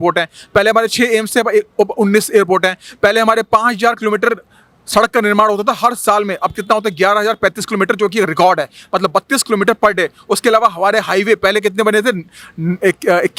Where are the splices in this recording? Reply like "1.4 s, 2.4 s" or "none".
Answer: none